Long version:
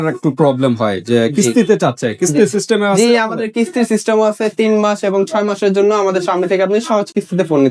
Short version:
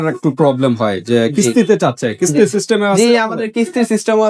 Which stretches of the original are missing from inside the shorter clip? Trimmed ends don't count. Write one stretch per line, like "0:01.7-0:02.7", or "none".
none